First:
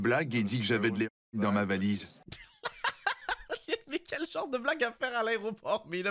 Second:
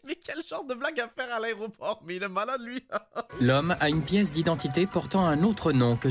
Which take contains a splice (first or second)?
second